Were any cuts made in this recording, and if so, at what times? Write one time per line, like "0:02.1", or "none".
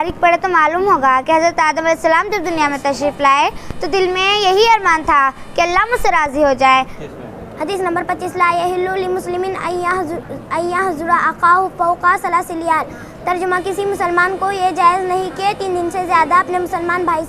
0:07.0